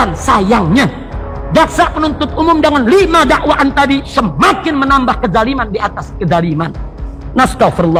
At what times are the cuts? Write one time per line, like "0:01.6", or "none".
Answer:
none